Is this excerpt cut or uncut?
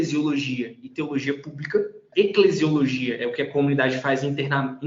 uncut